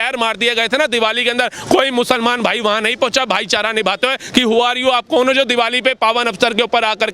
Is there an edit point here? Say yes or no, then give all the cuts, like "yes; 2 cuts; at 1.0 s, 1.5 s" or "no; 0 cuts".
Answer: no; 0 cuts